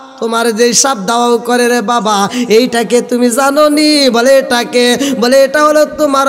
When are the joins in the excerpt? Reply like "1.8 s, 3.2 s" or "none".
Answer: none